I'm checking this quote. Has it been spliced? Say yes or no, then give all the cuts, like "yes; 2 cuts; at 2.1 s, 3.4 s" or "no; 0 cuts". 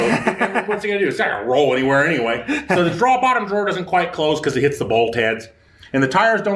no; 0 cuts